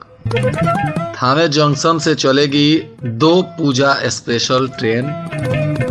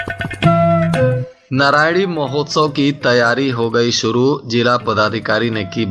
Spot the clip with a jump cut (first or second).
second